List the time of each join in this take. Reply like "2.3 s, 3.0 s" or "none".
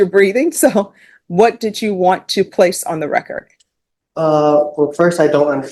none